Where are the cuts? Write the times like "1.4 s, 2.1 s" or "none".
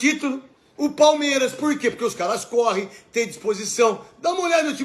none